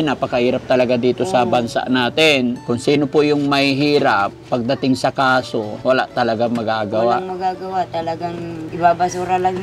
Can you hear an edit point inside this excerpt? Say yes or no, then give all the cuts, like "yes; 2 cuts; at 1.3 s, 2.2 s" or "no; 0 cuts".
yes; 3 cuts; at 2.6 s, 5.7 s, 8.6 s